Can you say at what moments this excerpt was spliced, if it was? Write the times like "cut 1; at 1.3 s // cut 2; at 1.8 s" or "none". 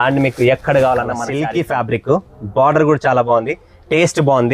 cut 1; at 1.3 s